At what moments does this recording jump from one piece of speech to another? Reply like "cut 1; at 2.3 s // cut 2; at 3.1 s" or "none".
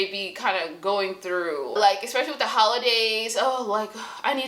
cut 1; at 1.8 s